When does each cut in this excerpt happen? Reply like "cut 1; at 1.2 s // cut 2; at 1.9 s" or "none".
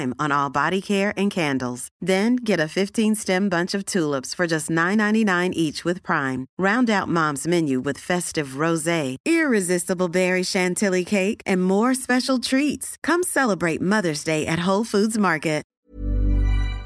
cut 1; at 15.8 s